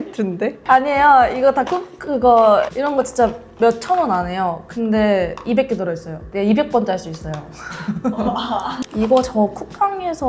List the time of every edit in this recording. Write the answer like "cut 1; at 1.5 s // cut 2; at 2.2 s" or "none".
cut 1; at 2.7 s // cut 2; at 8.8 s

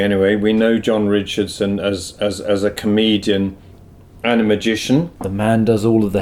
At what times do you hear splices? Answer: cut 1; at 5.2 s

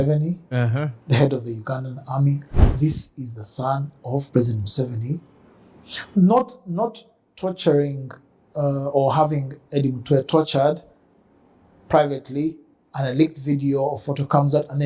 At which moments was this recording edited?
cut 1; at 2.5 s

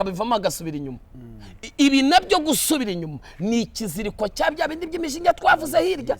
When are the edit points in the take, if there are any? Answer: none

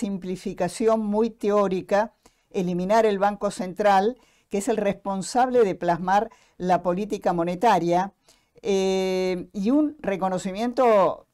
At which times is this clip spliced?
none

